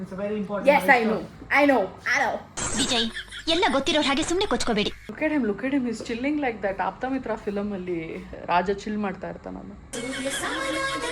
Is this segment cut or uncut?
uncut